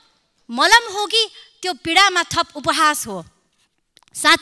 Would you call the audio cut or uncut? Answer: uncut